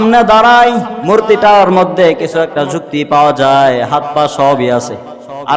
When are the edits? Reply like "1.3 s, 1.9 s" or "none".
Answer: 0.9 s